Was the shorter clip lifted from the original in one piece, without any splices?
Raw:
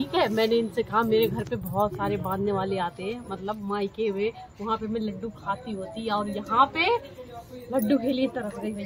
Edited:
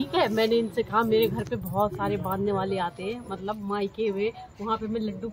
yes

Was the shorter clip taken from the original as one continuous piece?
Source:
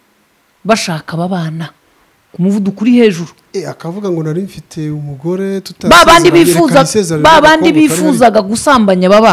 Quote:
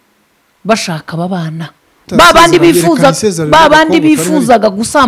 no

